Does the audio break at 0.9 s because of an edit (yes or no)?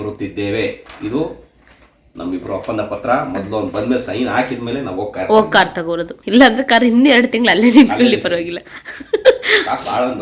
no